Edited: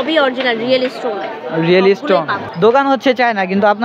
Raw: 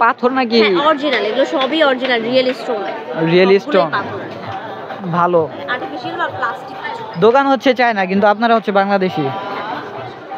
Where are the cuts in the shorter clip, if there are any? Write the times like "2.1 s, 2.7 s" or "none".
2.4 s